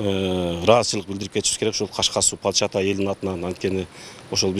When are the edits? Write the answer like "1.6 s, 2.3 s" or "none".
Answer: none